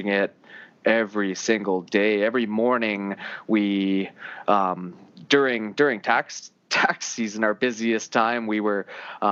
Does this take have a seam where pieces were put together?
no; 0 cuts

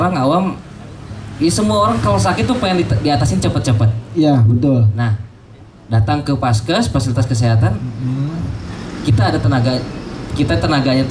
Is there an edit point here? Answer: no; 0 cuts

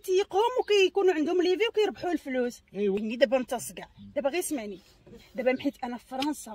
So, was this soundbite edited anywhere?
no; 0 cuts

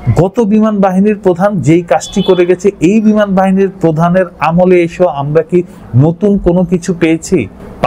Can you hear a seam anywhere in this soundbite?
no; 0 cuts

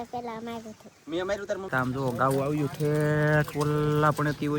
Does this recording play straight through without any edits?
no; 1 cut; at 1.7 s

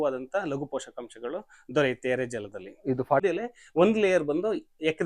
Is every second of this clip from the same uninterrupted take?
no; 1 cut; at 3.2 s

